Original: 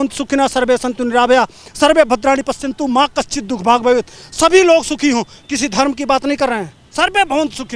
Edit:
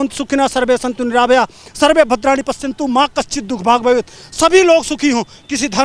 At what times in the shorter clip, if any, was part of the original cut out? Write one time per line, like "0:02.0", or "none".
none